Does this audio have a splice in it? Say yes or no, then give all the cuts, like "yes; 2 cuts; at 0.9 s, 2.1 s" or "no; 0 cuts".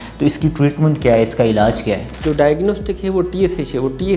yes; 1 cut; at 2.1 s